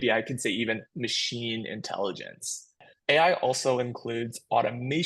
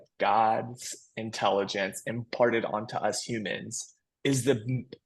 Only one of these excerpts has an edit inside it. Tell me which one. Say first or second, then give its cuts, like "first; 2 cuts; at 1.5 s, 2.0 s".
first; 1 cut; at 2.9 s